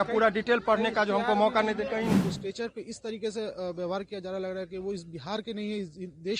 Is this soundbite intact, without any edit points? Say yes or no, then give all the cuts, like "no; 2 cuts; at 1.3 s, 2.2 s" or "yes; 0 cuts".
no; 1 cut; at 2.1 s